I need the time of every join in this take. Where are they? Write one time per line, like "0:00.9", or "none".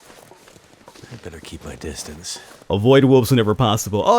0:02.5